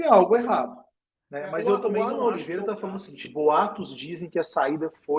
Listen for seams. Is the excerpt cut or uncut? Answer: cut